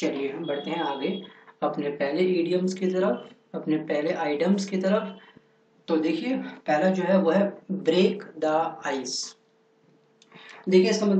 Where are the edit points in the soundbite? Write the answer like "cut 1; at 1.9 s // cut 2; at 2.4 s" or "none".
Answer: cut 1; at 3.9 s